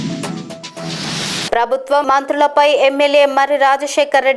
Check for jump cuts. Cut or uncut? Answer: cut